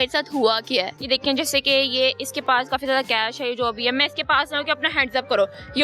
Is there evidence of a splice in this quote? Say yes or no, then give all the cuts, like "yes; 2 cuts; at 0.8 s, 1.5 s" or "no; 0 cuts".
yes; 1 cut; at 0.9 s